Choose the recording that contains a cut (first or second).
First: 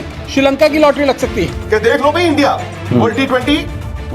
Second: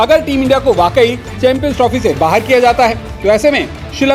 first